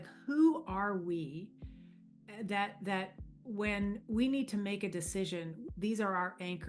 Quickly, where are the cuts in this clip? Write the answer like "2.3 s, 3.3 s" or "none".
none